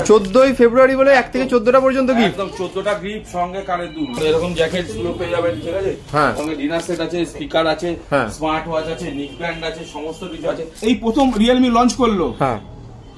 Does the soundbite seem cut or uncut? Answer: cut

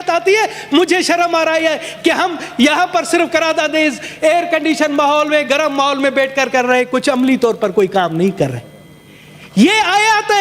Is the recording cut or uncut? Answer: uncut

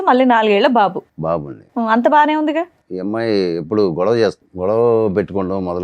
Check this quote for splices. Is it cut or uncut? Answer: cut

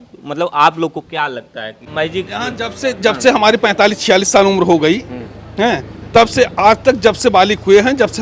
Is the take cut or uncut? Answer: cut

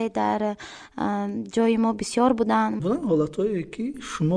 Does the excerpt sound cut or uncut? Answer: cut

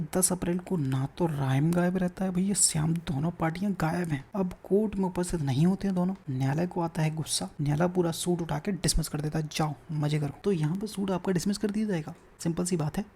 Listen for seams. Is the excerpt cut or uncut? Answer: cut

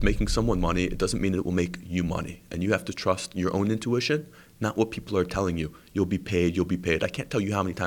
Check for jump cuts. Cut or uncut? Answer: uncut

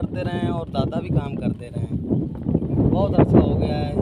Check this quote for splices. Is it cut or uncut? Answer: uncut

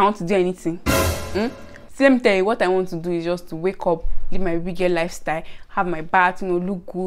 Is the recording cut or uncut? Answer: uncut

